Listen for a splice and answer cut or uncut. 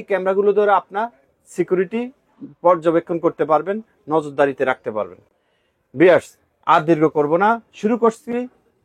uncut